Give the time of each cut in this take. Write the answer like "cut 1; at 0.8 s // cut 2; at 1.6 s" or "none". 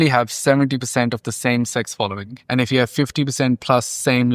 cut 1; at 2.3 s